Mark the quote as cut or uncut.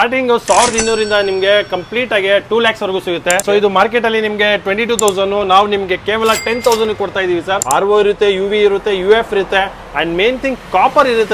cut